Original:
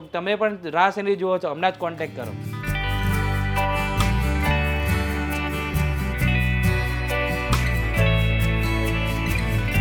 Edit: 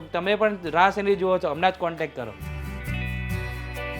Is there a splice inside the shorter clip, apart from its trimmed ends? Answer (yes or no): yes